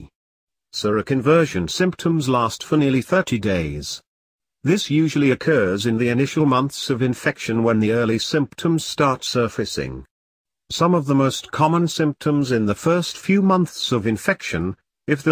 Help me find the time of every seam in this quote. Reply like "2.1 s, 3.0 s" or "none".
4.8 s